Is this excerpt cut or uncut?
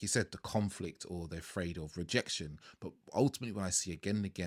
uncut